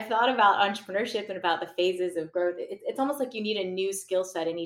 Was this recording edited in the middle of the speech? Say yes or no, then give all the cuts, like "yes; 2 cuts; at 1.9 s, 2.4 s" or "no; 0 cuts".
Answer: no; 0 cuts